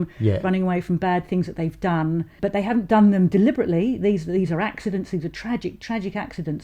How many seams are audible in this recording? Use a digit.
1